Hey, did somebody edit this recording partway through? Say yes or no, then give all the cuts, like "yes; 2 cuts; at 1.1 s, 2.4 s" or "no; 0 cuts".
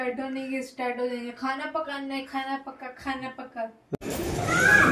yes; 1 cut; at 3.9 s